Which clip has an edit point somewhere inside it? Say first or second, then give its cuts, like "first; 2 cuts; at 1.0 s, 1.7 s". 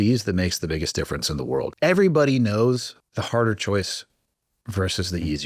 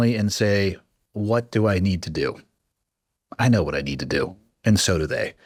first; 2 cuts; at 1.7 s, 3.0 s